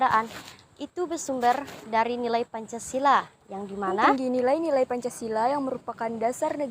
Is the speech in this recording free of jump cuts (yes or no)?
no